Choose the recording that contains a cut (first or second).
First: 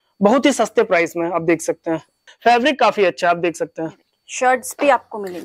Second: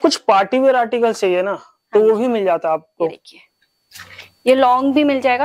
first